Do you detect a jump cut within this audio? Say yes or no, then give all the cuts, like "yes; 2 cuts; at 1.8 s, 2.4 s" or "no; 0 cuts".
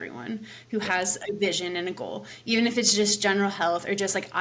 no; 0 cuts